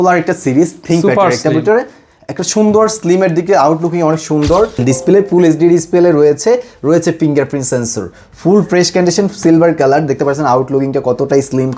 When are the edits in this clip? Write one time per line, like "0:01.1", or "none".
0:04.8